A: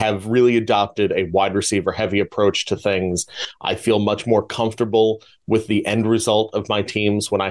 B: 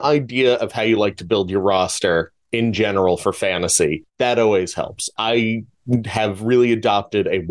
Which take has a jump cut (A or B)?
B